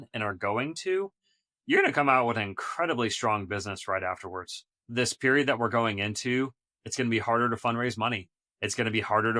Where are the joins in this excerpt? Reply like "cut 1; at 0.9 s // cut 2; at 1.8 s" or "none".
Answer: cut 1; at 4.9 s